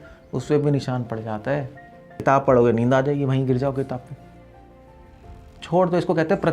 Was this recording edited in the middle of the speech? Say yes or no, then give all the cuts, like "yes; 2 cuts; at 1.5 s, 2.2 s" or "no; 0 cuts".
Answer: yes; 1 cut; at 2.0 s